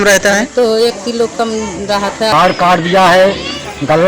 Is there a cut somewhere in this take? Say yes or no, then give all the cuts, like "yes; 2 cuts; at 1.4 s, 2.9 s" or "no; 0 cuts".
yes; 1 cut; at 2.4 s